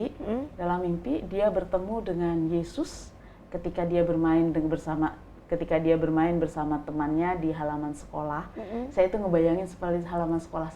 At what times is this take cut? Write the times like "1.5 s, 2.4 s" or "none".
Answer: none